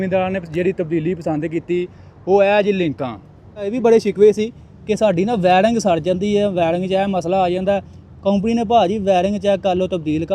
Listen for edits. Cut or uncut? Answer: cut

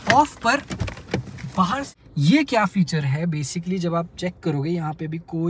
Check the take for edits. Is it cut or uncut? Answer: cut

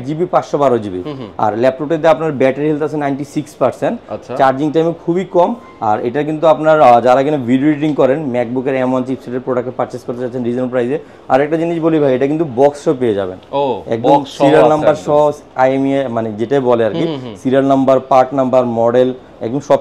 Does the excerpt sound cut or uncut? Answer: uncut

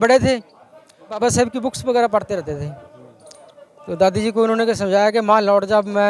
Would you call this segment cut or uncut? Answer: cut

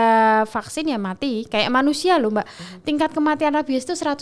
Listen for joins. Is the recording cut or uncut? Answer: uncut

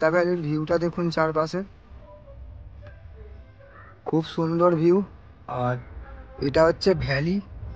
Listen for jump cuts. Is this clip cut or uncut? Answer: uncut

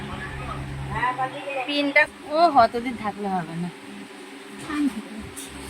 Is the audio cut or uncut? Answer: cut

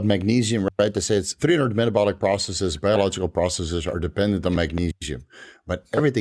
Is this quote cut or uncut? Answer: cut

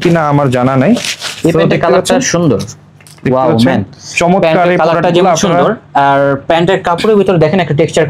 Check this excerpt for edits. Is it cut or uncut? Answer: uncut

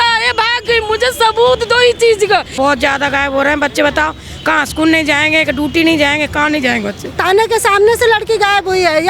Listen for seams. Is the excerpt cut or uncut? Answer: cut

